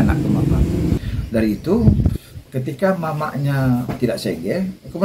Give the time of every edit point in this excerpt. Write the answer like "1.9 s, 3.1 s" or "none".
1.0 s